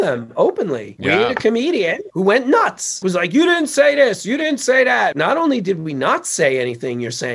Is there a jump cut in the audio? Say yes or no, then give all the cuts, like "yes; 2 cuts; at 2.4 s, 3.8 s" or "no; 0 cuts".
yes; 4 cuts; at 0.9 s, 2.0 s, 3.0 s, 5.1 s